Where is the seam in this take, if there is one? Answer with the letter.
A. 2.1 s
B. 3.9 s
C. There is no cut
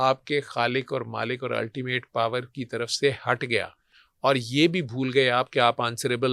C